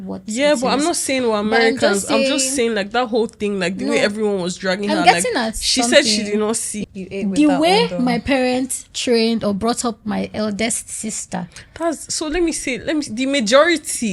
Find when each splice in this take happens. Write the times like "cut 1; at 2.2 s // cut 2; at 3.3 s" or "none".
cut 1; at 6.7 s